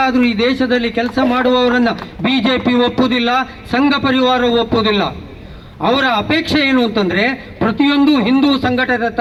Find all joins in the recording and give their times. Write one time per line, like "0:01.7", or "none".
none